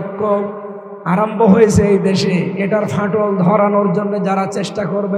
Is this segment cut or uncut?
uncut